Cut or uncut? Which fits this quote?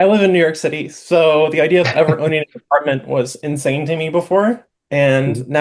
uncut